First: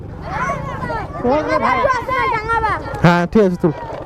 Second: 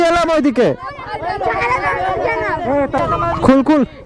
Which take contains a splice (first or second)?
second